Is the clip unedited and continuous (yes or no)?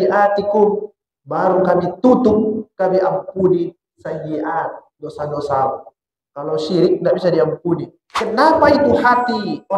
no